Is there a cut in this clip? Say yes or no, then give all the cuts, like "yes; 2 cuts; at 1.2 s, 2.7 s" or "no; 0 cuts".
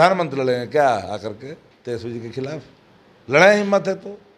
no; 0 cuts